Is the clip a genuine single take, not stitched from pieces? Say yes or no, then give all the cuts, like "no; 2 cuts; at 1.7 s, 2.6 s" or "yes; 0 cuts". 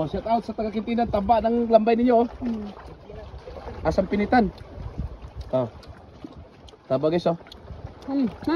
yes; 0 cuts